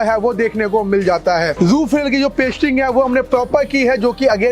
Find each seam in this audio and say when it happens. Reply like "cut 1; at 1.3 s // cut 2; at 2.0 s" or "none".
cut 1; at 1.5 s